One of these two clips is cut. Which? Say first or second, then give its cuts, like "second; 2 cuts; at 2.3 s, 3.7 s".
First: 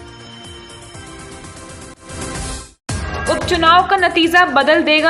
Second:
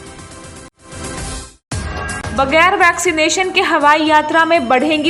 second; 1 cut; at 2.2 s